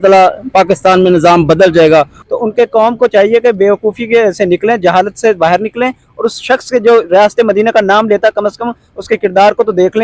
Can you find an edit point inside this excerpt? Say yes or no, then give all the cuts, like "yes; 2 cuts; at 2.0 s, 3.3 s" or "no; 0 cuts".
yes; 1 cut; at 2.2 s